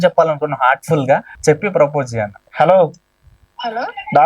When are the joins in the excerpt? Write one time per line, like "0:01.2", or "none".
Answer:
0:02.4